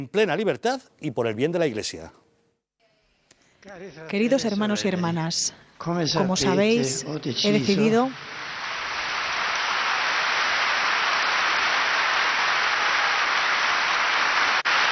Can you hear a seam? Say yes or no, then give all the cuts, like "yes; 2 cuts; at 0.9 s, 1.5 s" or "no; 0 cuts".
no; 0 cuts